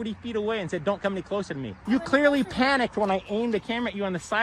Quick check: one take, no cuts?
no; 1 cut; at 1.7 s

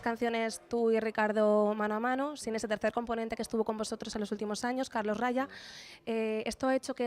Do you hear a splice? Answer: yes; 1 cut; at 5.9 s

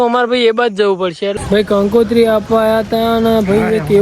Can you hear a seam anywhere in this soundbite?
yes; 1 cut; at 1.3 s

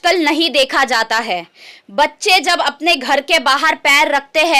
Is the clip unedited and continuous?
yes; 0 cuts

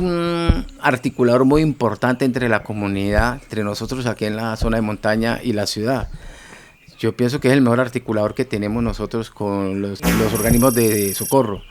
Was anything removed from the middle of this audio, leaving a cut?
yes; 2 cuts; at 3.5 s, 10.0 s

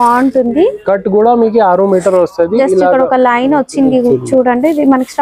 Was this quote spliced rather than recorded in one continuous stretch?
no; 0 cuts

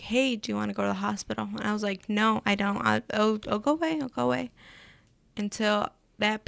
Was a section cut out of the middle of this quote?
no; 0 cuts

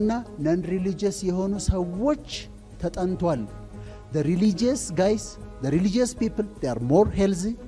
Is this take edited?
no; 0 cuts

